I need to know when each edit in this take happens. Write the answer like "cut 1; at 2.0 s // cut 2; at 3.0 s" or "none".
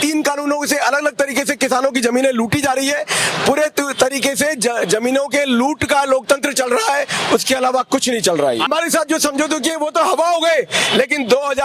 cut 1; at 8.7 s